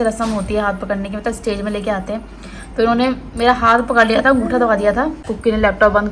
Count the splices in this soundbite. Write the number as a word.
one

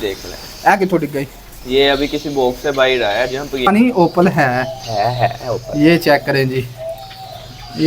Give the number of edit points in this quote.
one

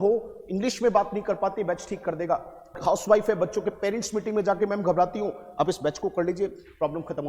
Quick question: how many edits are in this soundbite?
one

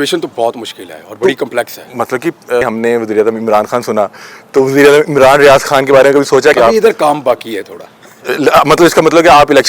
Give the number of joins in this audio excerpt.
two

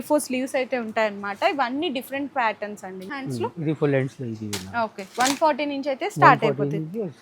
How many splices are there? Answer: one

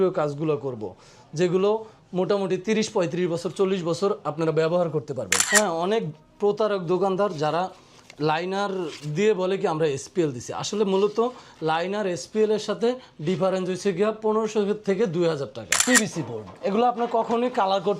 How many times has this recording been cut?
two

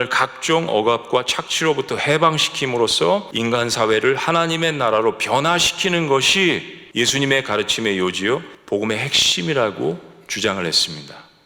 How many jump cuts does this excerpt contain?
zero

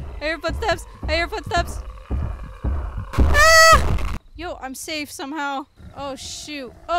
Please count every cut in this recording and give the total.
one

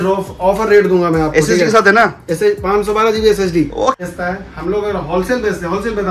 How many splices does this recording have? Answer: one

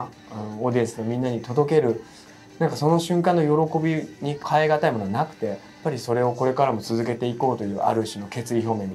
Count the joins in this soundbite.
two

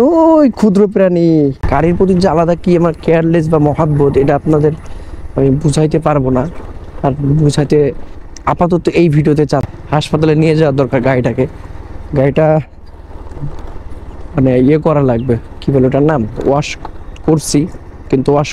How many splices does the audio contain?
two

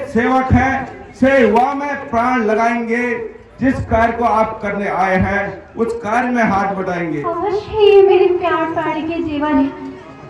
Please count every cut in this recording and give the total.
one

